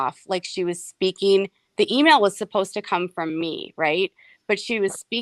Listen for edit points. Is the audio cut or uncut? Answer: cut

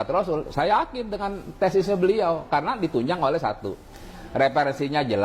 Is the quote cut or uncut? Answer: uncut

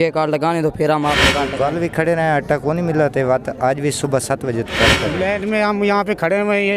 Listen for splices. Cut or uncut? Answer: cut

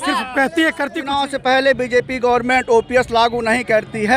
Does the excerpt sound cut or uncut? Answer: cut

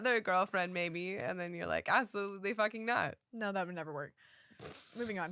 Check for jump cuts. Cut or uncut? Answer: cut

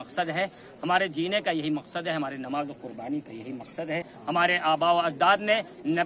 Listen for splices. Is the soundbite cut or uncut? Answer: cut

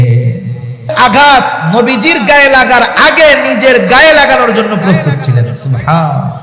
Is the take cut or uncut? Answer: cut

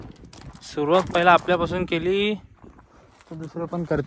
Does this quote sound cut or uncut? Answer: uncut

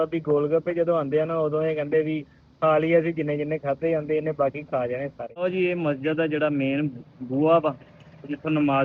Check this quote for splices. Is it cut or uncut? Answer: cut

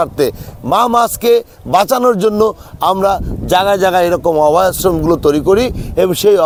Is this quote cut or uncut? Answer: uncut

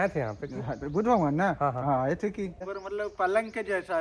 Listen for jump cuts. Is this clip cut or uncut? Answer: cut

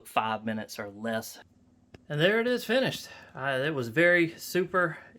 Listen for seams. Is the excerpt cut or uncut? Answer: cut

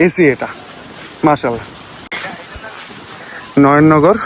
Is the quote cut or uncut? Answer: cut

